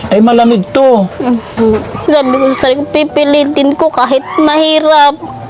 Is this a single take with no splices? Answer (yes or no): no